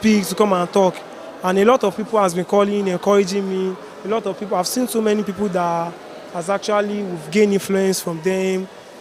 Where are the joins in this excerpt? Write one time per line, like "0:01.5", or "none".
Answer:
none